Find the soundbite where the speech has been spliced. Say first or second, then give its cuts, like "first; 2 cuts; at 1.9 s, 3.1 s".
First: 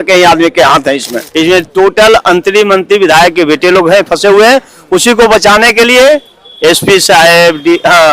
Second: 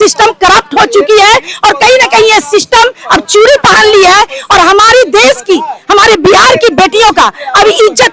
first; 1 cut; at 1.2 s